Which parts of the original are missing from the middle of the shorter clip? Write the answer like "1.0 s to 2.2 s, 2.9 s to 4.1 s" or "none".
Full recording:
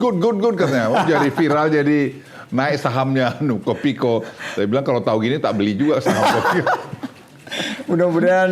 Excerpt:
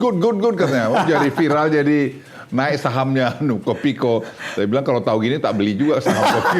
none